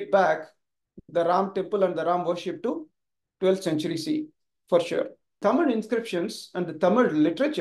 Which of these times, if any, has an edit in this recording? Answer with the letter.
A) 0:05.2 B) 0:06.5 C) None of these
A